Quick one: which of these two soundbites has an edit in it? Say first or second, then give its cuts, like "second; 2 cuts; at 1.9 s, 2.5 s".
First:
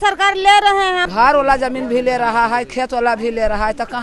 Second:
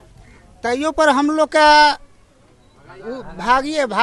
first; 1 cut; at 1.1 s